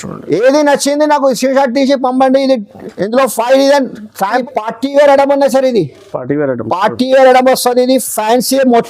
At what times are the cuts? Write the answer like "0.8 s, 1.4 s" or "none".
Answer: 4.4 s